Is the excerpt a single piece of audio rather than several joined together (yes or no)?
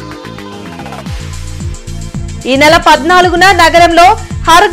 yes